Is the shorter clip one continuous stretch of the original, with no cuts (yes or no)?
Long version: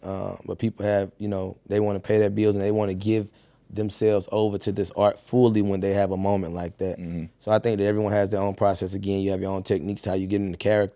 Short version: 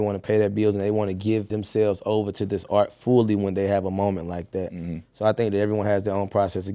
no